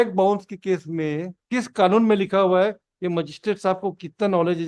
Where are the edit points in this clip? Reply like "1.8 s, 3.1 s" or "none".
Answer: 1.4 s